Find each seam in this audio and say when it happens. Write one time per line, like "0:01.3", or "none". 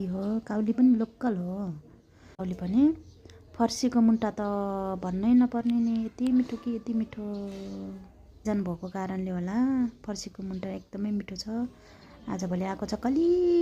0:02.4
0:08.4